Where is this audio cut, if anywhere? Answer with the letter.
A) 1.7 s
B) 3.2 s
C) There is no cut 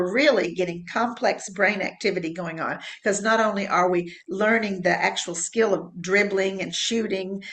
C